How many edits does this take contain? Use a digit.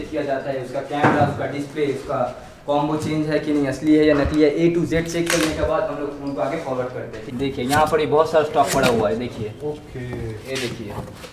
1